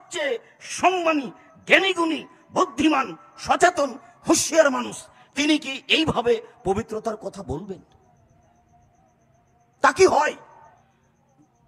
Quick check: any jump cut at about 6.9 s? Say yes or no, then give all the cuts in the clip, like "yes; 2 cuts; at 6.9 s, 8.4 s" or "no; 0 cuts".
no; 0 cuts